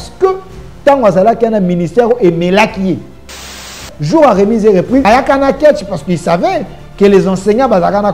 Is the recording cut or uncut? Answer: cut